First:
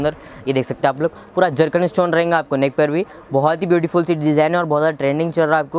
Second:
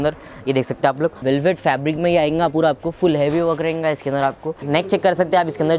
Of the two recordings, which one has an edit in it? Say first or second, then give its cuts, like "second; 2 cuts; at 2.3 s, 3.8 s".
second; 2 cuts; at 1.2 s, 4.6 s